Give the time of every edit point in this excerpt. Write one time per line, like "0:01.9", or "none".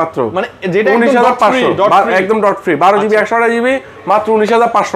none